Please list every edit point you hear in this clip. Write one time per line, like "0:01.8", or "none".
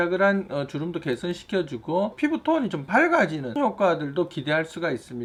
none